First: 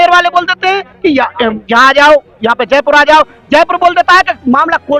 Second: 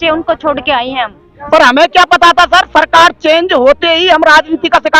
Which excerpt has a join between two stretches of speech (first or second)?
second